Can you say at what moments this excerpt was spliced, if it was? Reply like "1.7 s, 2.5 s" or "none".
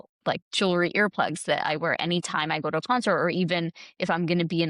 none